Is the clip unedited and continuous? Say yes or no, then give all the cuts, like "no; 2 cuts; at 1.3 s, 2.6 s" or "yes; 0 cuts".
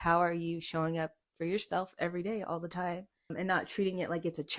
no; 1 cut; at 3.3 s